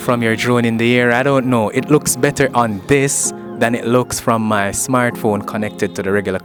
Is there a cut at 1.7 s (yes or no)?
no